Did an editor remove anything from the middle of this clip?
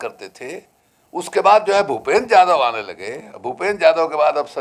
no; 0 cuts

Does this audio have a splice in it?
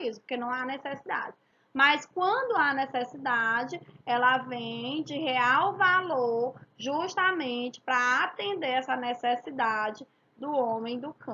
yes; 1 cut; at 7.1 s

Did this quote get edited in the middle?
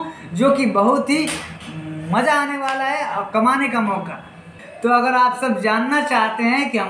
yes; 1 cut; at 4.4 s

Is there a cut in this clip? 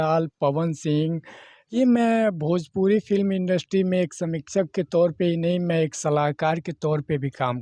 yes; 1 cut; at 1.7 s

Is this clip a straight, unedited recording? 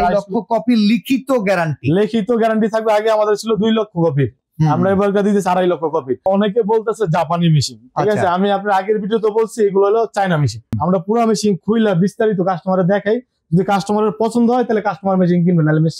no; 2 cuts; at 6.3 s, 10.7 s

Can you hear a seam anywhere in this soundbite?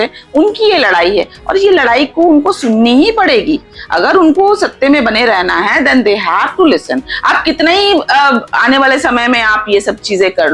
no; 0 cuts

